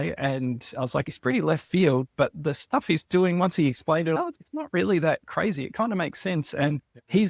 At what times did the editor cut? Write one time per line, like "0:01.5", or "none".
0:01.1
0:04.2